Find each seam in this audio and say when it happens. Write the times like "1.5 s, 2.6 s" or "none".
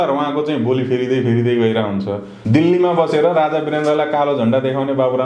2.4 s